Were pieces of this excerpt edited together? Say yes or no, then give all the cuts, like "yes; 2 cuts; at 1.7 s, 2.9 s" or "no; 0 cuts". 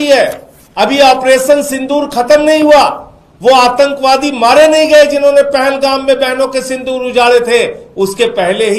no; 0 cuts